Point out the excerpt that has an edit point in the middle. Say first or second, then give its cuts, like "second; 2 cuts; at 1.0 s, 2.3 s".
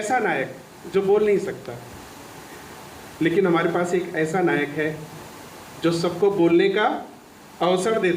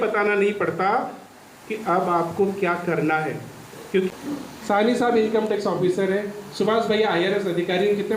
second; 1 cut; at 4.1 s